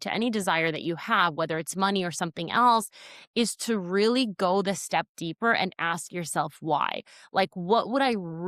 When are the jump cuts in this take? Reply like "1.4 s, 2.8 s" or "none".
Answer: none